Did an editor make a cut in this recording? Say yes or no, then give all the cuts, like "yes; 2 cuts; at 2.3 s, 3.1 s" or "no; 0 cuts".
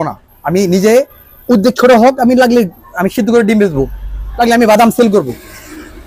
no; 0 cuts